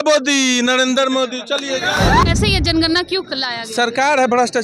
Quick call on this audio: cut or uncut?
cut